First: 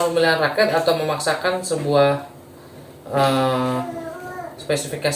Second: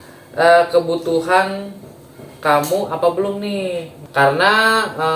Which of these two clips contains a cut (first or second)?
second